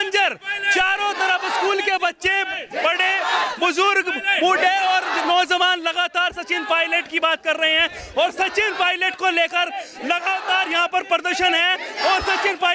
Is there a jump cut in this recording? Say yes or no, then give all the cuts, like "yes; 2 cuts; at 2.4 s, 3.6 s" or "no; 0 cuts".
no; 0 cuts